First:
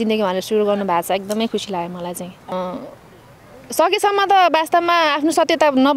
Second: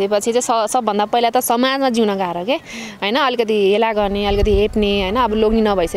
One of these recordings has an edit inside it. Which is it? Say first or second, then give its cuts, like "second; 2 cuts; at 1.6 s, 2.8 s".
first; 1 cut; at 2.5 s